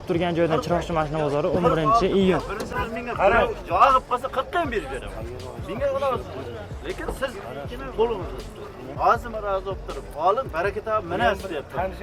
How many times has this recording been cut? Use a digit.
2